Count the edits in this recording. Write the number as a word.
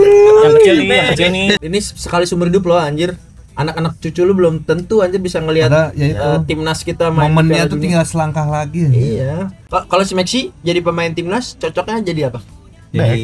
two